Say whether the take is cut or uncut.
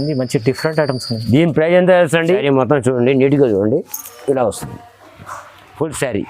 cut